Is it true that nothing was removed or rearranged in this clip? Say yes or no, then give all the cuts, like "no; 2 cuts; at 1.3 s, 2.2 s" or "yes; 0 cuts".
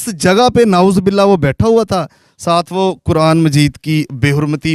yes; 0 cuts